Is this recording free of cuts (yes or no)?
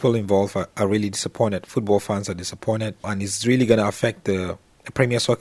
no